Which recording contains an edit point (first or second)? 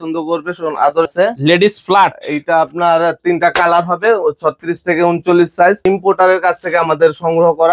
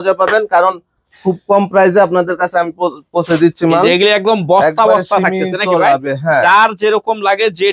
first